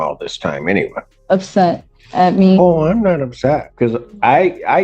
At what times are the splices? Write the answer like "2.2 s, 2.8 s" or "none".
1.1 s, 3.7 s

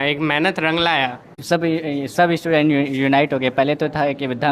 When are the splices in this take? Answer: 1.4 s

